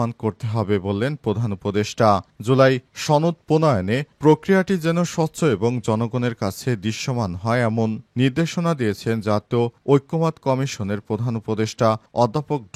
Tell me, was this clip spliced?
no; 0 cuts

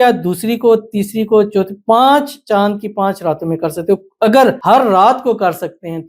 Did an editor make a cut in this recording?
yes; 1 cut; at 4.6 s

